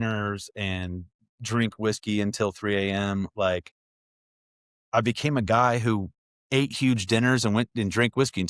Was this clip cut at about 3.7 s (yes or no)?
no